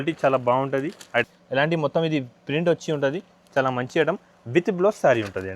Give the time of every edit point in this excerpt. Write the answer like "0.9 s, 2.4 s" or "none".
1.2 s